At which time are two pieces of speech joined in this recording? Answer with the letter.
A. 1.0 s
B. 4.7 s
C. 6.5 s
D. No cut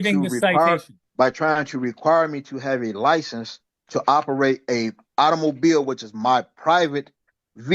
A